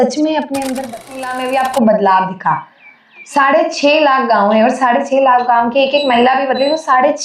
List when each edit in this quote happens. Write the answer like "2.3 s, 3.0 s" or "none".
1.2 s